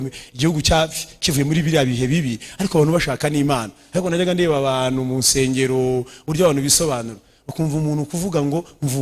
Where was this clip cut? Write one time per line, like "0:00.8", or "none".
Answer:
none